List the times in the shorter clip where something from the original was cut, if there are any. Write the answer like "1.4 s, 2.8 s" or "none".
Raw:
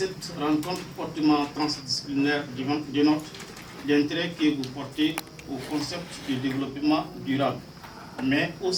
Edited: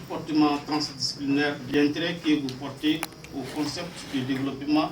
1.6 s